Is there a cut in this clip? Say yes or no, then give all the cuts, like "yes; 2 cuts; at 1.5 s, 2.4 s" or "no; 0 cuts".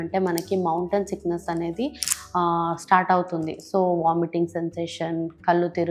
no; 0 cuts